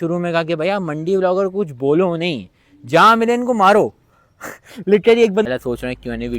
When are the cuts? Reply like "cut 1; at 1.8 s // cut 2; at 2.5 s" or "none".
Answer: cut 1; at 5.5 s